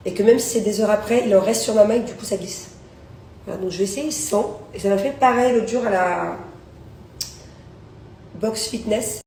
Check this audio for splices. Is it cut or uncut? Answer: uncut